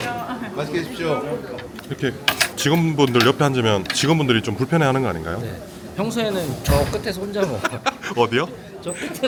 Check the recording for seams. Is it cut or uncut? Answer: uncut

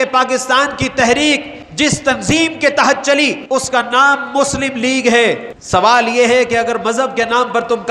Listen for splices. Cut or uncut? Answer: cut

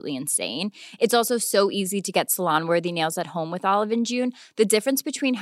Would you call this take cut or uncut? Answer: uncut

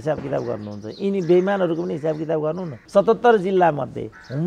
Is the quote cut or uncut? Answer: cut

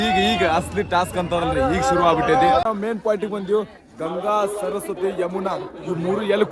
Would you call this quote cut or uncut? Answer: cut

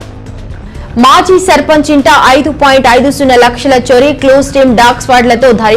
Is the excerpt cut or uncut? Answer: cut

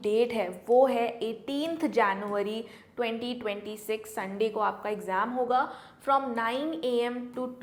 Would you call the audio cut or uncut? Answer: uncut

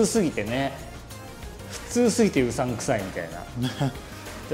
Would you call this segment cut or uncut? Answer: uncut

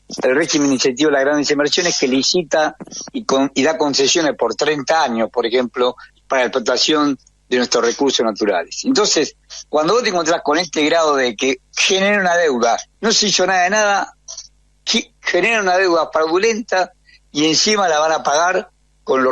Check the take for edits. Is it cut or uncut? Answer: cut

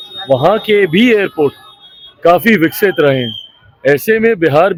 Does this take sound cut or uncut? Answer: uncut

